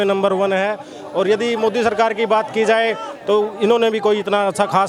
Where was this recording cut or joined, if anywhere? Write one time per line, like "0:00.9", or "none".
none